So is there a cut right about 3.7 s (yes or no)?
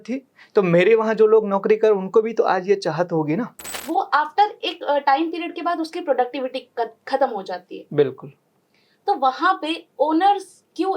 yes